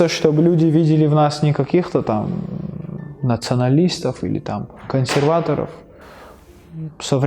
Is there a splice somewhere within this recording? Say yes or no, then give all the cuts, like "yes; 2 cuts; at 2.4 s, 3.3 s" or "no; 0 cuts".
no; 0 cuts